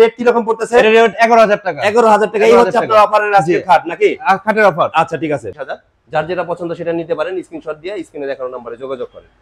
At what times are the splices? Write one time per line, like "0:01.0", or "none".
0:05.5

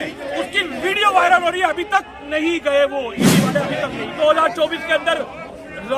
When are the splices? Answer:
0:04.1

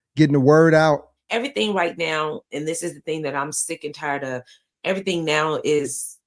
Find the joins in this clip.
0:01.0

